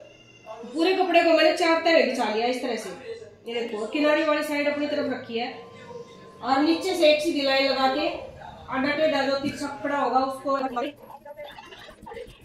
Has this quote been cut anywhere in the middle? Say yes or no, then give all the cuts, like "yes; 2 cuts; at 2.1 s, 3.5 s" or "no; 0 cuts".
no; 0 cuts